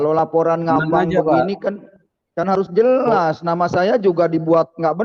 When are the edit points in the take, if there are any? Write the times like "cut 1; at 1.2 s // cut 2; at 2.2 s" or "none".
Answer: none